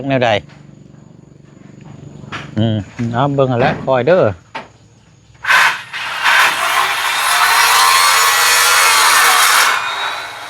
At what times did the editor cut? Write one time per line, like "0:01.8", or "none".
0:02.9